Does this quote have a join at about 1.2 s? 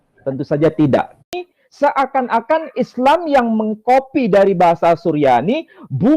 yes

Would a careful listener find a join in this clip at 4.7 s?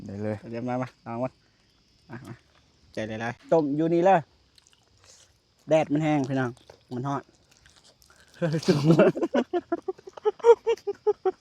no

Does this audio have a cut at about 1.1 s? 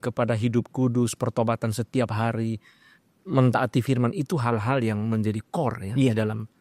no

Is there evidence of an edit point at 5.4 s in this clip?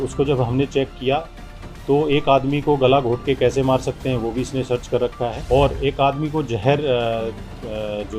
yes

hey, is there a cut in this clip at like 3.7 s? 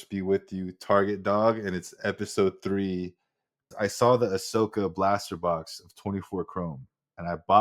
yes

